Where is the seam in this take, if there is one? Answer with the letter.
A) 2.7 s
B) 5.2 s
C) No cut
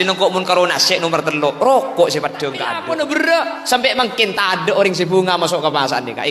A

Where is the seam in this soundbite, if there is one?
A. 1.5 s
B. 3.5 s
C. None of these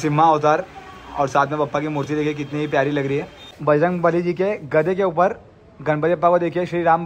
B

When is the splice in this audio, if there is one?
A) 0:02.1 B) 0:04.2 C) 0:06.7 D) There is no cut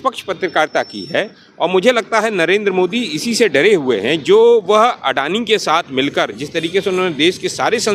D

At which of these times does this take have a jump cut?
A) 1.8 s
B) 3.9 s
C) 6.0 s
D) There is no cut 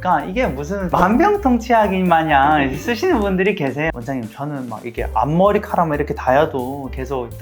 B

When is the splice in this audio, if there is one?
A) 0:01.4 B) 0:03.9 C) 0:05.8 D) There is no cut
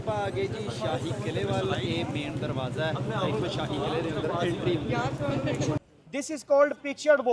C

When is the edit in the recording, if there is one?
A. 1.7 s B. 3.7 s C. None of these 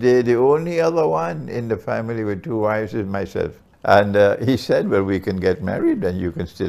B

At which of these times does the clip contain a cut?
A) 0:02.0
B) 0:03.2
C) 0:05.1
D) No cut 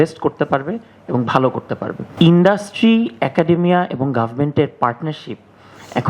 A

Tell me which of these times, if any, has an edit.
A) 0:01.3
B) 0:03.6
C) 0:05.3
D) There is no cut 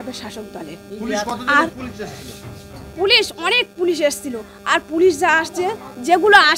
D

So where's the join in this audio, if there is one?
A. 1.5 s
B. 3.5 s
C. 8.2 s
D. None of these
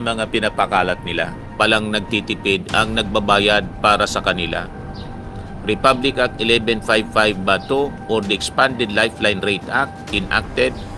A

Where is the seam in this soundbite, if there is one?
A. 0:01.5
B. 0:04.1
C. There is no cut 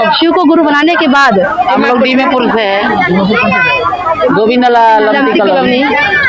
A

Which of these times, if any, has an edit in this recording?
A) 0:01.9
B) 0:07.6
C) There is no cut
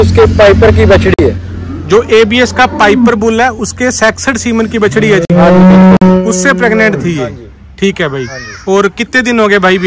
C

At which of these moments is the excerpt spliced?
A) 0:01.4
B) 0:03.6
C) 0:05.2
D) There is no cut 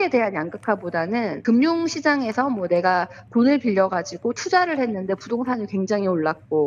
A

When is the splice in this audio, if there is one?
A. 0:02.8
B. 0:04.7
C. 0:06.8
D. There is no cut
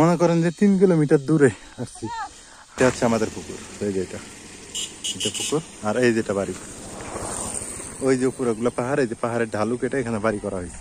A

